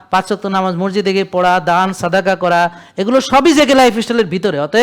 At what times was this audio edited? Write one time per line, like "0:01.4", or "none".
none